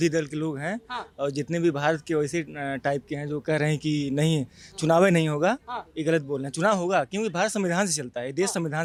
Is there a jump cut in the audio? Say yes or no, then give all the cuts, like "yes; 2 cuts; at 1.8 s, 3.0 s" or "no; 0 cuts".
no; 0 cuts